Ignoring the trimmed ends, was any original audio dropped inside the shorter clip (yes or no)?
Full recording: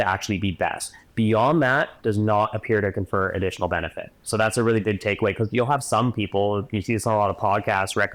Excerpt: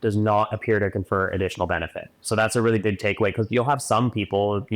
no